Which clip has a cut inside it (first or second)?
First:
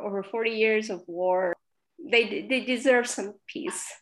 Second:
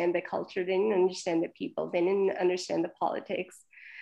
first